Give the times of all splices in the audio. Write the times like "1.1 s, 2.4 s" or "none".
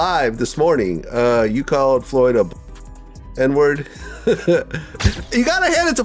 4.9 s